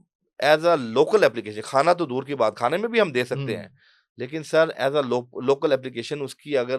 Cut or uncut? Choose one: uncut